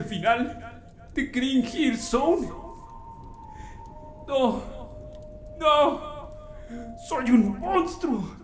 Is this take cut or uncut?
uncut